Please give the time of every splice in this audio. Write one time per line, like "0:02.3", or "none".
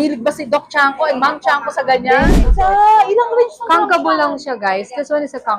0:02.4